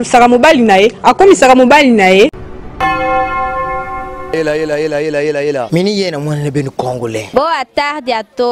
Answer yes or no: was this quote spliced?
yes